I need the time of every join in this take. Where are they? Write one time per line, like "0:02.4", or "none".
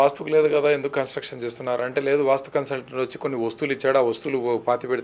none